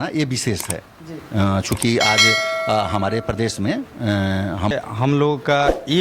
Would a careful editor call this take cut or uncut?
cut